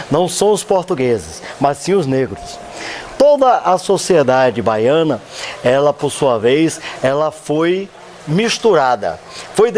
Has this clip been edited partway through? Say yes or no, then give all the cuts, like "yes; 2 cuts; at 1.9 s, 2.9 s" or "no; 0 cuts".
yes; 1 cut; at 1.7 s